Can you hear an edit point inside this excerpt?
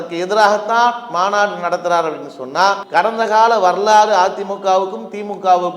yes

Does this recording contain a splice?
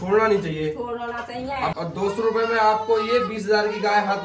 yes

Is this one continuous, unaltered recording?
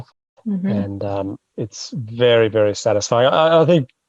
no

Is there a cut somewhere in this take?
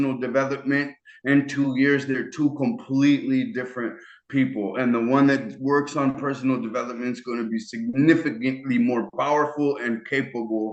no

